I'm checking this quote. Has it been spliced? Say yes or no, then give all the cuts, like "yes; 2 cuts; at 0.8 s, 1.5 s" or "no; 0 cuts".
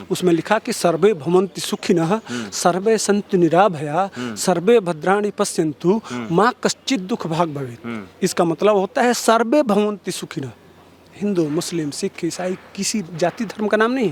no; 0 cuts